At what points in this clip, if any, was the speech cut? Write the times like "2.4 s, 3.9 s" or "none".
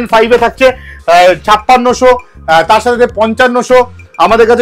none